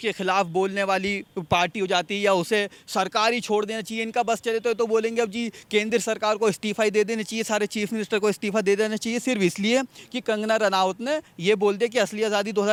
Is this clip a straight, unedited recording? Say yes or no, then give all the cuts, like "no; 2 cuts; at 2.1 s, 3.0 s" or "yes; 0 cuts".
yes; 0 cuts